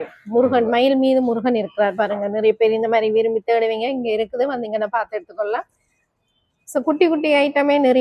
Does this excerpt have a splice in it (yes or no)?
no